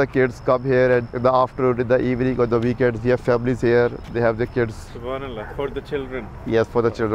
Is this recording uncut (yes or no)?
yes